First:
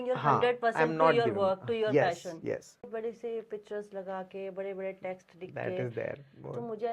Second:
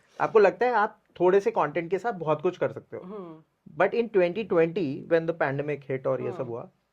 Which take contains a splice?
first; 1 cut; at 2.9 s

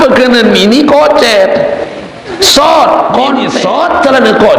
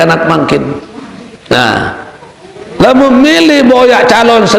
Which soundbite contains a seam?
first; 1 cut; at 3.5 s

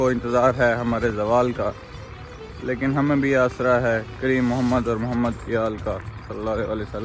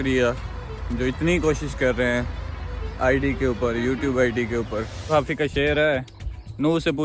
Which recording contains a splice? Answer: second; 1 cut; at 5.1 s

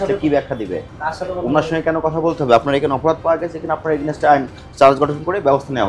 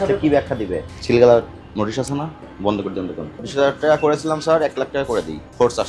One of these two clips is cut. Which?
second; 2 cuts; at 0.9 s, 3.4 s

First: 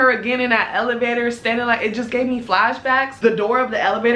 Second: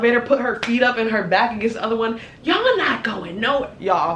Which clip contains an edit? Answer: first; 1 cut; at 3.1 s

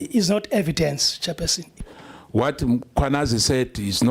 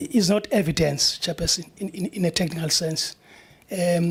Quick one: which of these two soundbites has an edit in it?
first; 1 cut; at 1.8 s

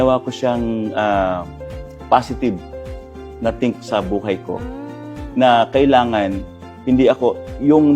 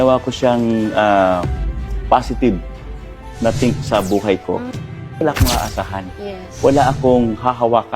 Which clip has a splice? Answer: second; 1 cut; at 5.2 s

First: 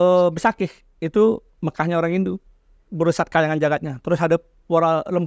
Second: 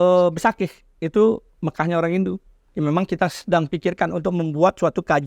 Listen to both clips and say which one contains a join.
second; 1 cut; at 2.6 s

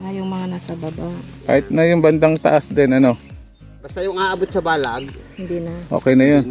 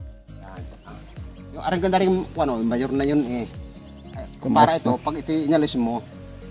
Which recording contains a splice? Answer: second; 1 cut; at 1.5 s

